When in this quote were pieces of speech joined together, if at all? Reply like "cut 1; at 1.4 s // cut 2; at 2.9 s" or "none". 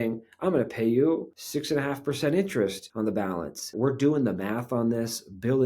cut 1; at 3.7 s